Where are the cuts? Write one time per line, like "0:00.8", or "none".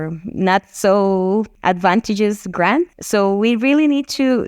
0:01.5
0:03.0

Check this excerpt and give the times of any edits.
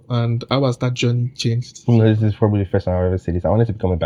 none

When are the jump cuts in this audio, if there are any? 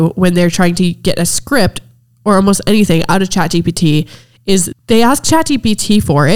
0:04.7

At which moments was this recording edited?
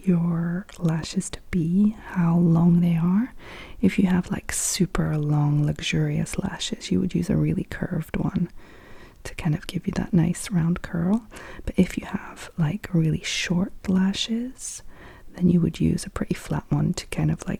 none

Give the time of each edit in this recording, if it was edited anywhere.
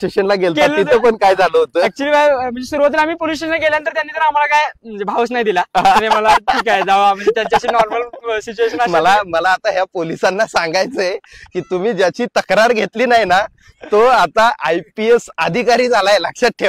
none

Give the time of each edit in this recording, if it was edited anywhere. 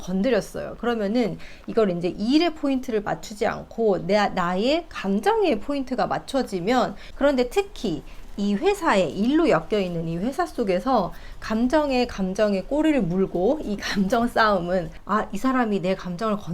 0:07.0
0:15.0

